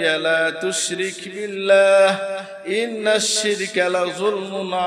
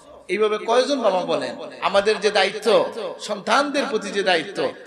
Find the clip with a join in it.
second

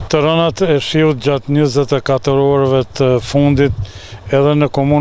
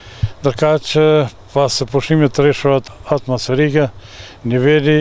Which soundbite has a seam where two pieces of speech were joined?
second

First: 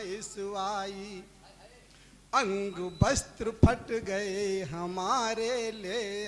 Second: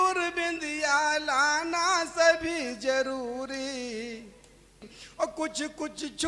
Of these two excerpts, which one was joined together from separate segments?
second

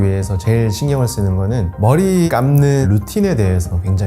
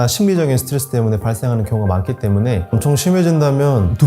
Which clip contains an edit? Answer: second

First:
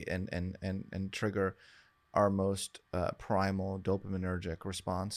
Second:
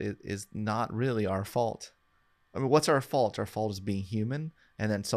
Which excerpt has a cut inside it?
second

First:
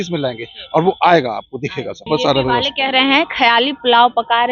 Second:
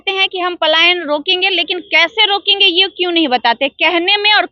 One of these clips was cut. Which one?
first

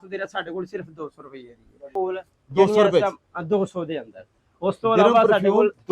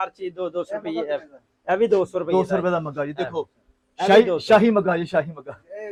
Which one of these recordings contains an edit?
first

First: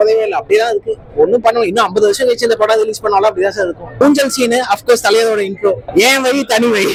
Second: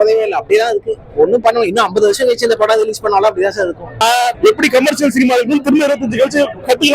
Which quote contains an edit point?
second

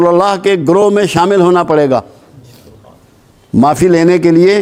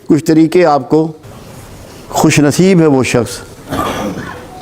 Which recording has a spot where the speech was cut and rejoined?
second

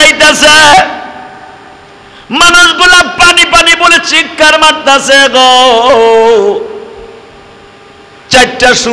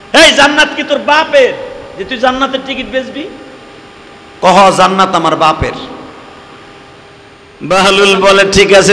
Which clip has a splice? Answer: second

